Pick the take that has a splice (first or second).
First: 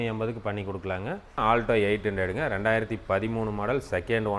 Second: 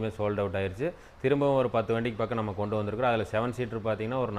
first